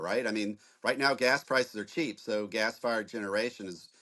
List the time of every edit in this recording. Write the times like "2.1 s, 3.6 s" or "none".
none